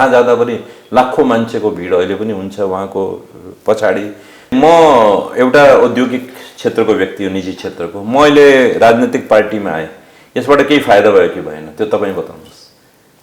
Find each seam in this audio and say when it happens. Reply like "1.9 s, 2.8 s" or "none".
4.5 s